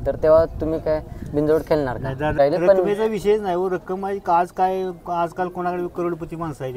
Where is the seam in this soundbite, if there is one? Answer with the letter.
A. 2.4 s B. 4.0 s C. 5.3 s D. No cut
A